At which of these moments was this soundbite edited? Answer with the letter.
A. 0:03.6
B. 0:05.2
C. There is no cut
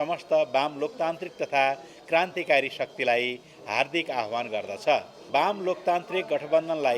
B